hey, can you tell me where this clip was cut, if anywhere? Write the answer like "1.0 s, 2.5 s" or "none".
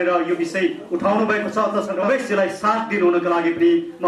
2.0 s